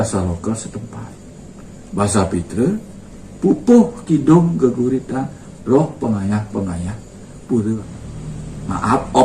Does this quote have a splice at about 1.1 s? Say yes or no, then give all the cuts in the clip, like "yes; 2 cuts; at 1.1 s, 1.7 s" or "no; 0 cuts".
no; 1 cut; at 7.8 s